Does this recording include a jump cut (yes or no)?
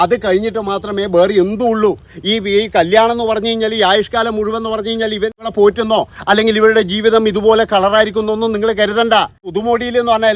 yes